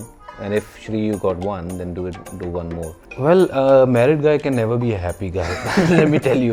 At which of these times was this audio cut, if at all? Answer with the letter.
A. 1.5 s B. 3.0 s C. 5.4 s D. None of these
B